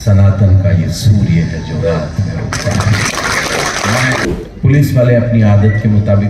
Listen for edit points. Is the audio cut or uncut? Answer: cut